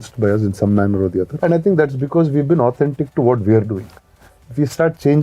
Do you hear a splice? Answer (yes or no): yes